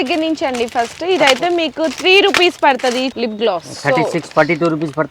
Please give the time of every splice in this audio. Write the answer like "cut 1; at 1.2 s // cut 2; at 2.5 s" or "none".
cut 1; at 3.1 s